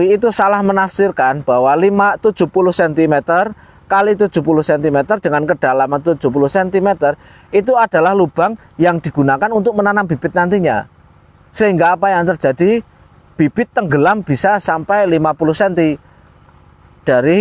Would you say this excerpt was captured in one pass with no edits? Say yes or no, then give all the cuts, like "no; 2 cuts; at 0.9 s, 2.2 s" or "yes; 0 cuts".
yes; 0 cuts